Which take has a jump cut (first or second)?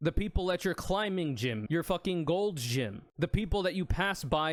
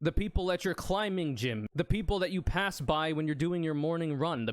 second